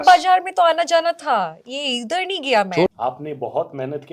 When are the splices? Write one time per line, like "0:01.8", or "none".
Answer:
0:02.9